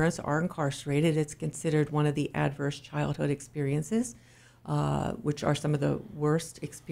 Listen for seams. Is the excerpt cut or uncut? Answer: uncut